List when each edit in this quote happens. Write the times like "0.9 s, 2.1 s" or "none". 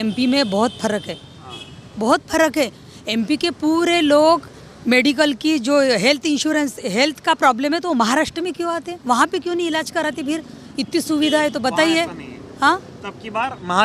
none